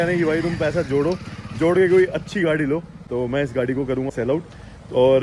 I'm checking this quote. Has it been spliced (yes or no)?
yes